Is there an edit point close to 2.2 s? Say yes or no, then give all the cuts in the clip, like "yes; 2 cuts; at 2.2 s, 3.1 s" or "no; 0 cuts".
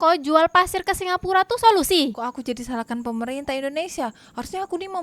yes; 1 cut; at 2.2 s